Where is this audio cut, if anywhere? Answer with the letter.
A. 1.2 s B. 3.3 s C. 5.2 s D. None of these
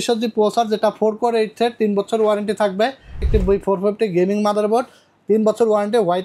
B